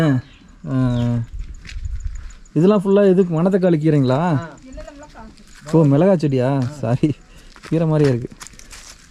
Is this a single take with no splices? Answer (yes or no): yes